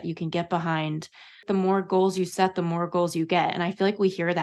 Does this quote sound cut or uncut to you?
cut